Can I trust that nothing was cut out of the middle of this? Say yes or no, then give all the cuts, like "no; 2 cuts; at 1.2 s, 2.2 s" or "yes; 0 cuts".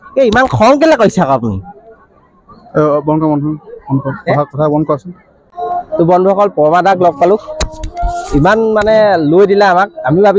yes; 0 cuts